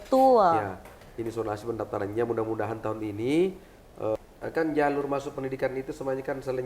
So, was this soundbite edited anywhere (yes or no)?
yes